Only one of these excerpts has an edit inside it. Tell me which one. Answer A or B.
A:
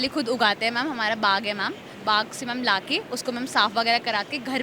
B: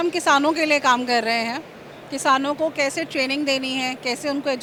A